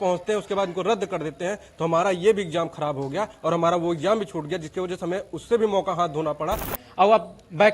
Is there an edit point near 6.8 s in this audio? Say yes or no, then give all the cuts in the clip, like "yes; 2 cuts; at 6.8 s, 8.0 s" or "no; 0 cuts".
yes; 1 cut; at 6.8 s